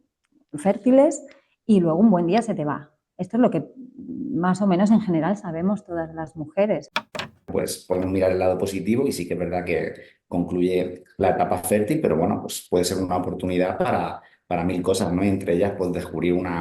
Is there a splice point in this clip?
yes; 1 cut; at 7.5 s

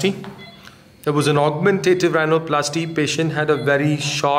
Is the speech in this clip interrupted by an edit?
no; 0 cuts

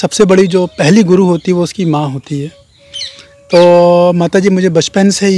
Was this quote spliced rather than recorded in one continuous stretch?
no; 0 cuts

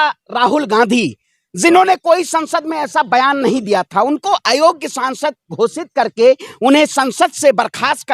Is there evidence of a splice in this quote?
no; 0 cuts

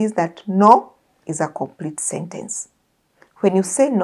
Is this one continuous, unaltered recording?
yes; 0 cuts

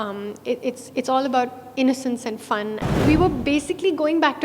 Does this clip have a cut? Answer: yes; 1 cut; at 3.0 s

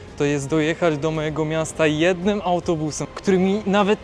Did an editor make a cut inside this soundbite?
yes; 1 cut; at 3.0 s

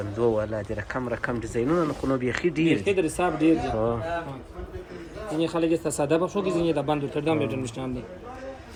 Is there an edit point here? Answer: no; 0 cuts

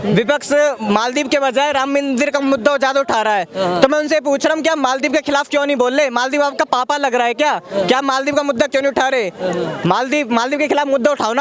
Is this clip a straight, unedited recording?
yes; 0 cuts

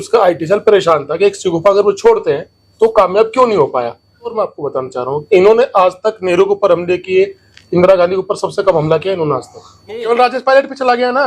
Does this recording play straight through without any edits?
no; 2 cuts; at 4.3 s, 10.1 s

